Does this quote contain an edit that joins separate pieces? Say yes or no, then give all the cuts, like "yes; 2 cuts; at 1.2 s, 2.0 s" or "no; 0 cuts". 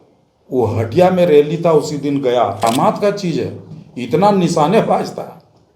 yes; 1 cut; at 2.6 s